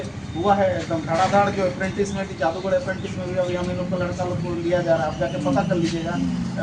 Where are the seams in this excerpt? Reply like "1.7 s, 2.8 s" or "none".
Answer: none